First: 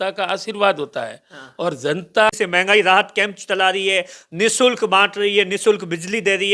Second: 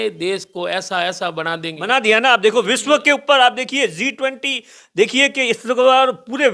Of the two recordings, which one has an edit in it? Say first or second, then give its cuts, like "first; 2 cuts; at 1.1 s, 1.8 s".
first; 1 cut; at 2.3 s